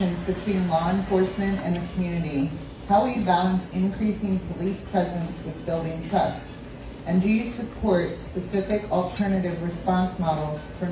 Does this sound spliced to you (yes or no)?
no